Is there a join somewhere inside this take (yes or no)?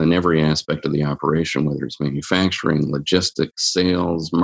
no